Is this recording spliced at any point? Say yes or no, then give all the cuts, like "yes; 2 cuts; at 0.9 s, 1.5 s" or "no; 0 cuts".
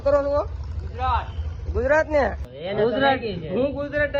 yes; 1 cut; at 2.5 s